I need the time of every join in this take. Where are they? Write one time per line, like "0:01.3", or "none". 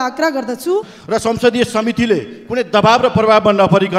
0:00.9